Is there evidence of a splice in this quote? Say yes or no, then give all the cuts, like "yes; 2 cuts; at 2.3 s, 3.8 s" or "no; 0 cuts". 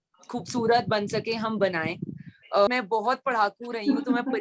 yes; 1 cut; at 2.7 s